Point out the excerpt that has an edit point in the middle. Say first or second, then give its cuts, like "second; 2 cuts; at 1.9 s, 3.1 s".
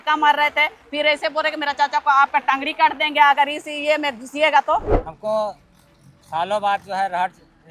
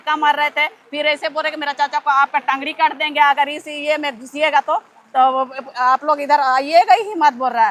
first; 1 cut; at 5.0 s